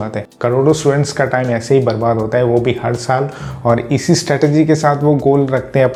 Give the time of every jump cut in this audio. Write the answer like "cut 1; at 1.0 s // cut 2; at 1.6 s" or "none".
none

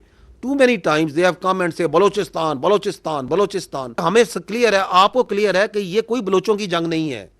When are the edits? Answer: cut 1; at 4.0 s

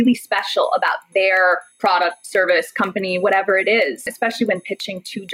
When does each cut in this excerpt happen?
cut 1; at 4.1 s

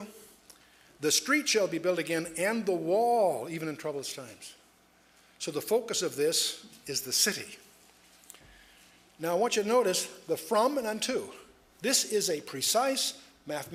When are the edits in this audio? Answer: none

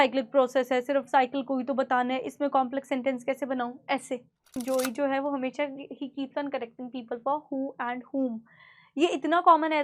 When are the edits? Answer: cut 1; at 4.5 s

